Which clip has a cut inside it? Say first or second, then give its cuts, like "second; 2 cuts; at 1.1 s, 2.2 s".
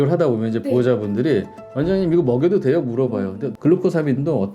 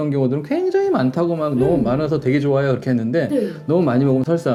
first; 2 cuts; at 1.6 s, 3.4 s